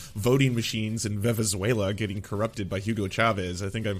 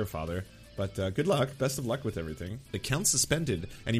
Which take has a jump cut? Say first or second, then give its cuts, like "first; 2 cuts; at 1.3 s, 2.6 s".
second; 1 cut; at 2.8 s